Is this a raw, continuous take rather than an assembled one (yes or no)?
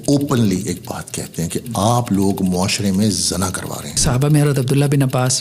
no